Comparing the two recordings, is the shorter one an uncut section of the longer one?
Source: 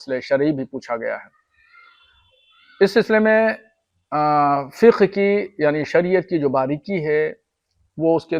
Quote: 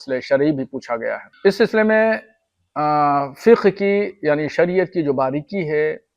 no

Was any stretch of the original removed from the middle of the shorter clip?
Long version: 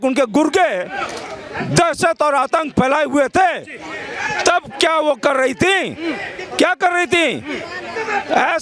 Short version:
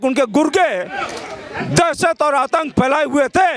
no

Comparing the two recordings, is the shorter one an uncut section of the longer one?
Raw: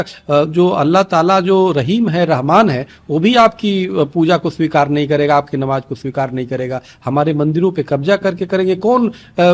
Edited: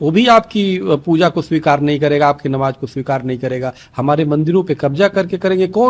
yes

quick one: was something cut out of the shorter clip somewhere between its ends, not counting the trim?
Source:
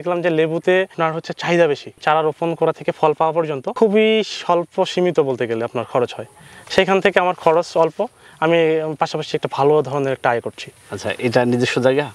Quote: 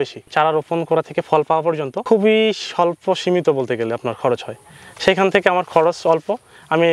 no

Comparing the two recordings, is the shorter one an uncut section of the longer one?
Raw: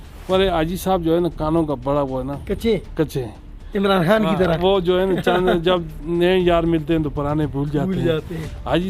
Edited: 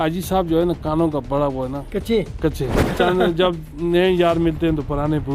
no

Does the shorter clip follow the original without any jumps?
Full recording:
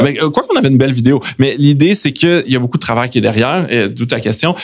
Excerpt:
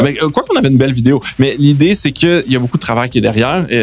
yes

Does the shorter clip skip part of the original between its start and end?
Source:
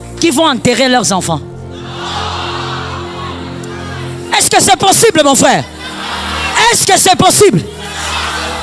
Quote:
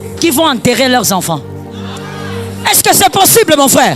yes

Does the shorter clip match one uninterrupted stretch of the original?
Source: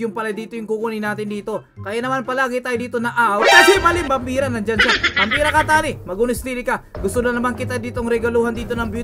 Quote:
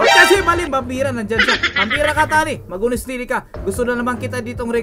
yes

